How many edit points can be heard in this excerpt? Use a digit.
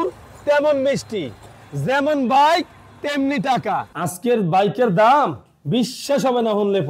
1